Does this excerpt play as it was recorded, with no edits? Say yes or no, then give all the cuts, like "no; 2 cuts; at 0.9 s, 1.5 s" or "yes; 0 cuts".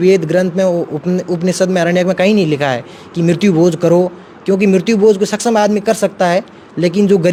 yes; 0 cuts